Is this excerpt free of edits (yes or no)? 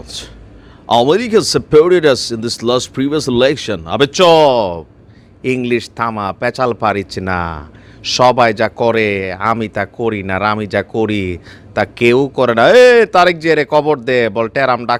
yes